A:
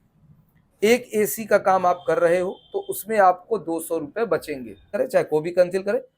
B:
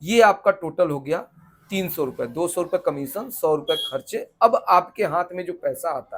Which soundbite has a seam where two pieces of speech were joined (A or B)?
A